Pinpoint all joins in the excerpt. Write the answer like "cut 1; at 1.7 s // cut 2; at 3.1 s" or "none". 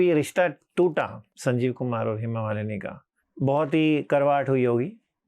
cut 1; at 1.2 s